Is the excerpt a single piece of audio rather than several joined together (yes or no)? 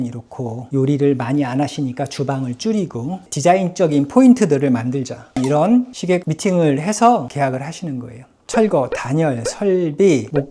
no